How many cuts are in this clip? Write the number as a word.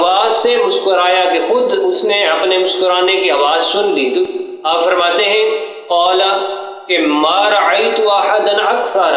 one